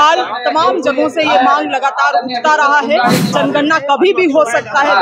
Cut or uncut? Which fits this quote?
cut